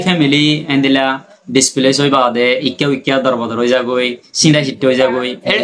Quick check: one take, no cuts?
yes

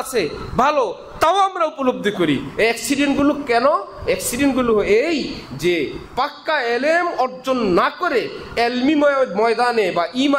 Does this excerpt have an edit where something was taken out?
no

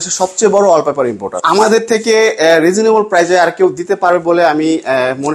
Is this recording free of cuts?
no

